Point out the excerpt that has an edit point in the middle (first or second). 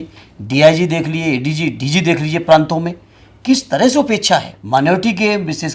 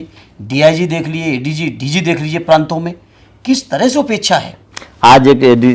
first